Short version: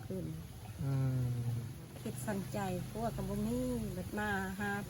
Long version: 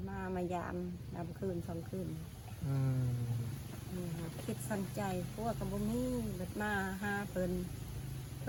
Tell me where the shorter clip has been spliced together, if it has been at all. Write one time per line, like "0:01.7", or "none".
0:01.9